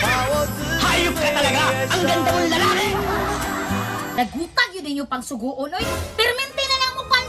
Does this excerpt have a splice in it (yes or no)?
yes